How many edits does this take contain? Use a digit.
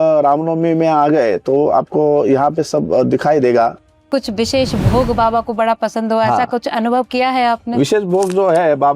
1